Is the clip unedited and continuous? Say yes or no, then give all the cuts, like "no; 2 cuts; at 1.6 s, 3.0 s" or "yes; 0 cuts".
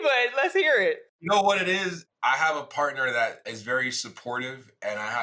no; 2 cuts; at 1.1 s, 2.0 s